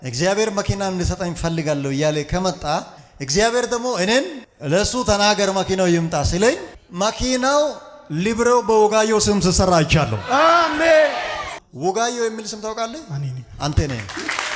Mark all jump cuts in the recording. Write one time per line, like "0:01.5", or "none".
none